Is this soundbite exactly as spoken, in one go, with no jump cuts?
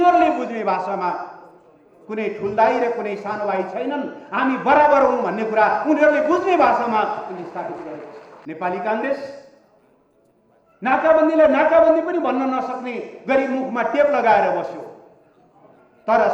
no; 1 cut; at 8.3 s

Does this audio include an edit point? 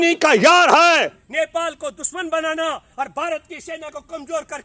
yes; 1 cut; at 1.2 s

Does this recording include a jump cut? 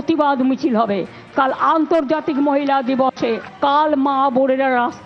no; 0 cuts

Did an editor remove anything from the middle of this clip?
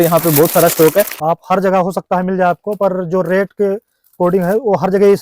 yes; 1 cut; at 1.1 s

